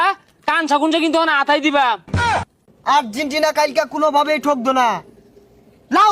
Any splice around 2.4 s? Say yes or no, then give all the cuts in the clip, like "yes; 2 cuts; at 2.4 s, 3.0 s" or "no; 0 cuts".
yes; 1 cut; at 2.4 s